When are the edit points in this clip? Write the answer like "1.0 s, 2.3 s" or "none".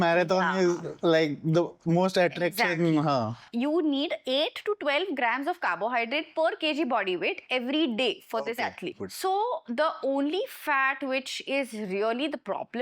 3.4 s, 9.0 s